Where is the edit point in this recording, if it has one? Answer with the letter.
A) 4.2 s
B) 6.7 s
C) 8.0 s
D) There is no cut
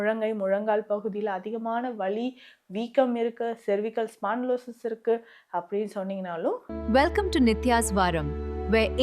B